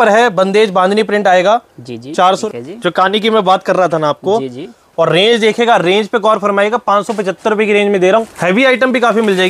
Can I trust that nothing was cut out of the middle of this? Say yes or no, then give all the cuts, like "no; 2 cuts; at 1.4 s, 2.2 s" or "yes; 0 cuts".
no; 2 cuts; at 2.5 s, 8.3 s